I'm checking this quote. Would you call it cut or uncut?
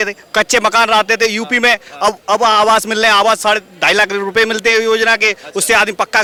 uncut